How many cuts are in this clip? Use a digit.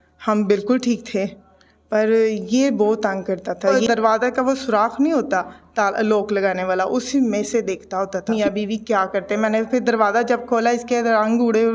2